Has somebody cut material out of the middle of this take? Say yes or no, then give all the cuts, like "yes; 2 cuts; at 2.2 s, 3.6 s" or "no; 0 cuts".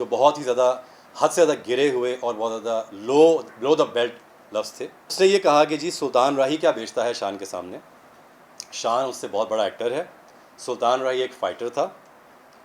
yes; 1 cut; at 5.0 s